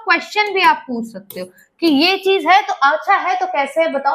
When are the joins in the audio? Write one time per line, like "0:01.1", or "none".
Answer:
none